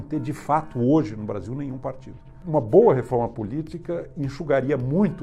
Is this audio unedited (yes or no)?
no